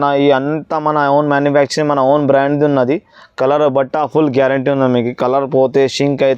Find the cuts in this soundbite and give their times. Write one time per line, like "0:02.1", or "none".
none